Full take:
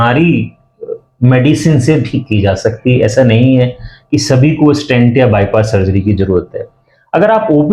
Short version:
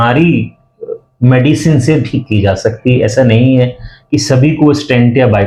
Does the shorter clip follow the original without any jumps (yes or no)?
yes